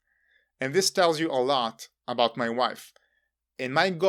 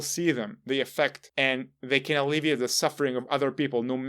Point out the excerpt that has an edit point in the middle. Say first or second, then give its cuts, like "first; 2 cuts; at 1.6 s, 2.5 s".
second; 1 cut; at 1.2 s